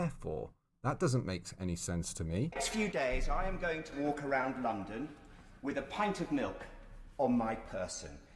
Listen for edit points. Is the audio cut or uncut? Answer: cut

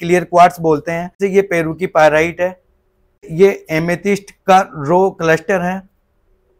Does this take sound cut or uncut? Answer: cut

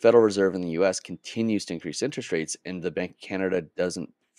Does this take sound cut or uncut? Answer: uncut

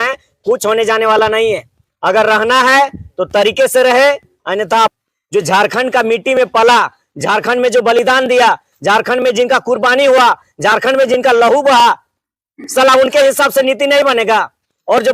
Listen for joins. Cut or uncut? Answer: cut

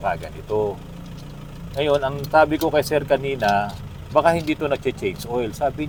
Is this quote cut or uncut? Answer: uncut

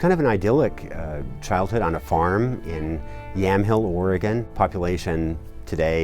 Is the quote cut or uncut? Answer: cut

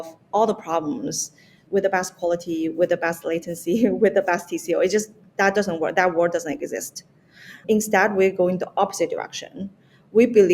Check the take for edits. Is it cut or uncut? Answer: cut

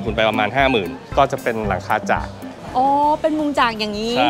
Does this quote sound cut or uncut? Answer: uncut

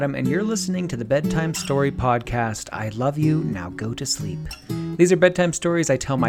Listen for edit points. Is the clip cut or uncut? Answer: uncut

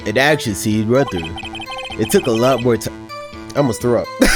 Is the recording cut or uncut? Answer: uncut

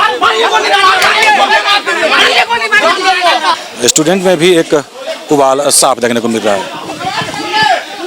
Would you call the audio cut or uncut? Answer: cut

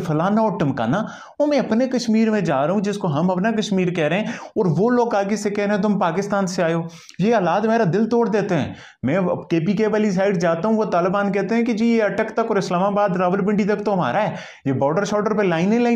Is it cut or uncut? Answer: uncut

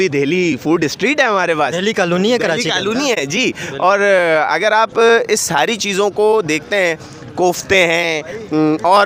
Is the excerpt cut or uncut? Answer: uncut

